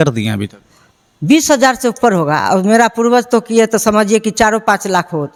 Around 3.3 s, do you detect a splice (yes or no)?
no